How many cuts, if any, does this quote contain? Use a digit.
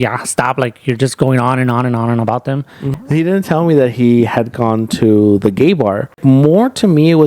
2